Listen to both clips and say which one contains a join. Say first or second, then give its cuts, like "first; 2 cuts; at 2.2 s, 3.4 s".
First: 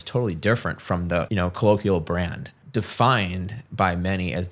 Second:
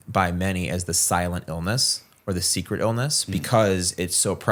first; 2 cuts; at 1.3 s, 2.5 s